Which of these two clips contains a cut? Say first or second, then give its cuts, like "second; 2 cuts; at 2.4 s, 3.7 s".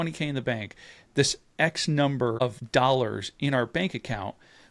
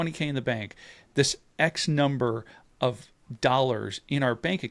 first; 1 cut; at 2.5 s